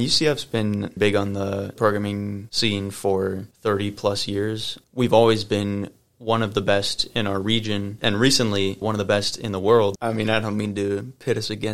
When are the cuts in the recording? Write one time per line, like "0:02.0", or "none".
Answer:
0:00.9
0:10.0